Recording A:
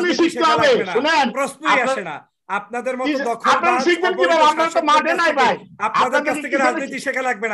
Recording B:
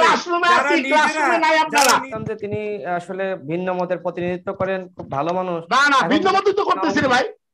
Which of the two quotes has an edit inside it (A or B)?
B